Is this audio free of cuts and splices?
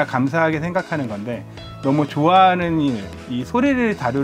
yes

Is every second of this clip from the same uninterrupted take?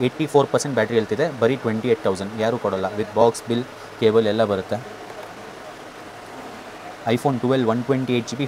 yes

